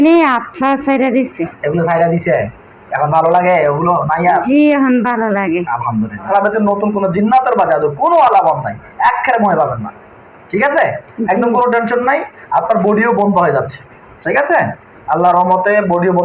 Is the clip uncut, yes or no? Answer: no